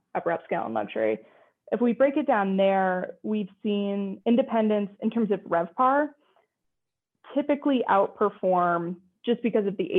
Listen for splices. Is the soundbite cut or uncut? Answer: cut